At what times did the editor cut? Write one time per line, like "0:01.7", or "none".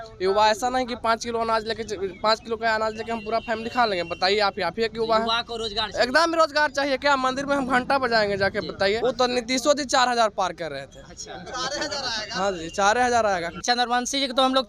0:09.0
0:13.6